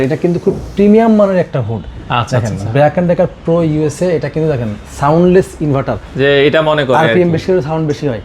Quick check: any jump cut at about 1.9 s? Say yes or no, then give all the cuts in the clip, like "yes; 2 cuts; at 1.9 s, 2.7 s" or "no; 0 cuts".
no; 0 cuts